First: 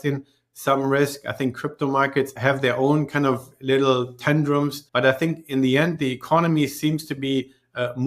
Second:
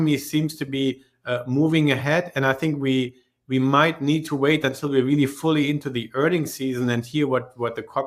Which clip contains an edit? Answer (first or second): first